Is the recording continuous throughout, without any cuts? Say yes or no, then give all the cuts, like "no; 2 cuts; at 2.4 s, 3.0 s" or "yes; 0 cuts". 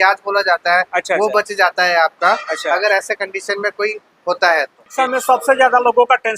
no; 1 cut; at 4.9 s